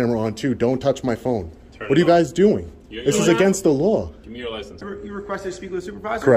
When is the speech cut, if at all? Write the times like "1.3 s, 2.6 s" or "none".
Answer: 4.9 s